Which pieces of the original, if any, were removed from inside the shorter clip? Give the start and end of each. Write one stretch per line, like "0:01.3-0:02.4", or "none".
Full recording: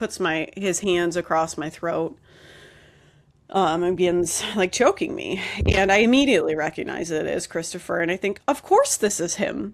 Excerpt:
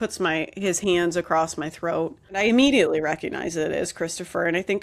0:02.4-0:05.9